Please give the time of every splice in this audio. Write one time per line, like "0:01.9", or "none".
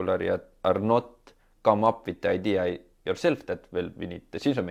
none